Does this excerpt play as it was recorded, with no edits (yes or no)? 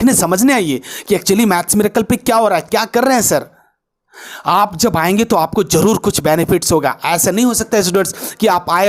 yes